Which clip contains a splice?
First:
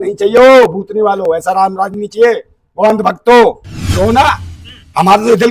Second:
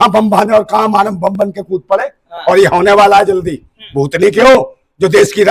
first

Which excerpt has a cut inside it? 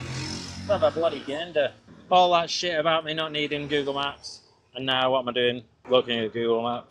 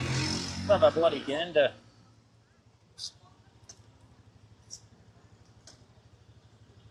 first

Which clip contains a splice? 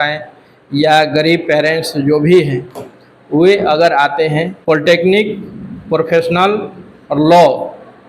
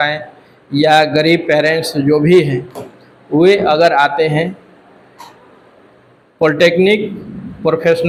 first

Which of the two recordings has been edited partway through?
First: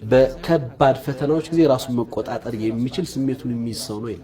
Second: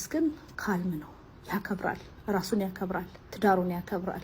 second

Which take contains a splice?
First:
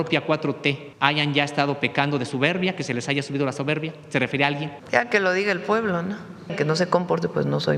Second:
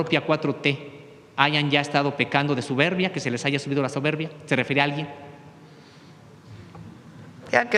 first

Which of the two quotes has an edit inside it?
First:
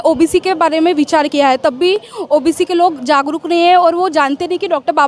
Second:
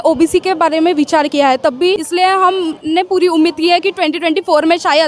second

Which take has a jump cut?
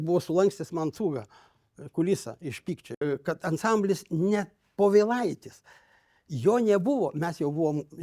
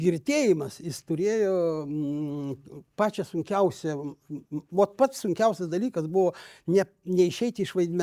first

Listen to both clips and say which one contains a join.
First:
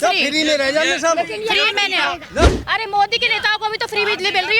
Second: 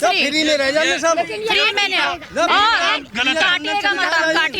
first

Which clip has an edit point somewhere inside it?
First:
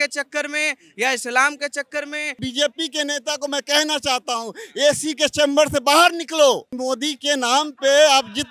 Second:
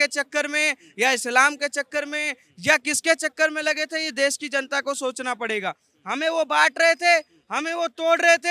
first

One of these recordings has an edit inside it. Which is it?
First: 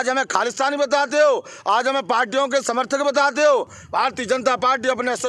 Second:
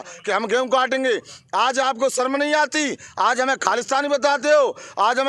first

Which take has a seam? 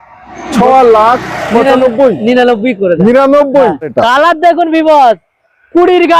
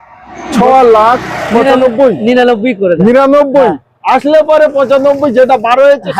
first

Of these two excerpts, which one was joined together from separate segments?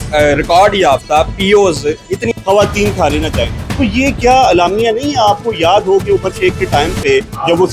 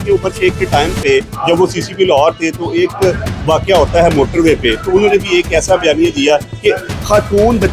first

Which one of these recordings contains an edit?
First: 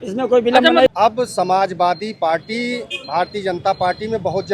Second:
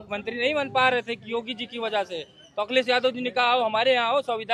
first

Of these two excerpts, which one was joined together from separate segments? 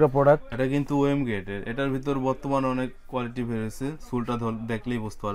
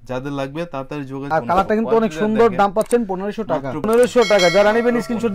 second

